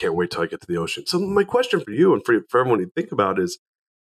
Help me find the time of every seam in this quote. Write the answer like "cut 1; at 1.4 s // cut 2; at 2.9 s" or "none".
cut 1; at 1.8 s